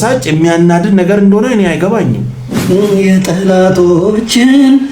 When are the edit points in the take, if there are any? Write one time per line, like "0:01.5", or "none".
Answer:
0:02.6